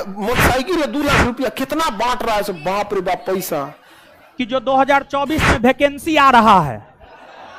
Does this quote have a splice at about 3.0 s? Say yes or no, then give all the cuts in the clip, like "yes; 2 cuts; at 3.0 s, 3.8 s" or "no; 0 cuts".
no; 1 cut; at 4.3 s